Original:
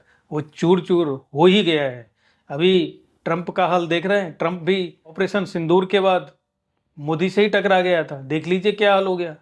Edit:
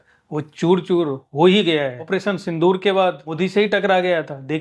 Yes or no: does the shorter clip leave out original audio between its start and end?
yes